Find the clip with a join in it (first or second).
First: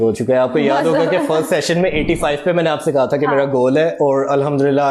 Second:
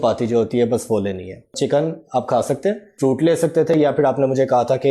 second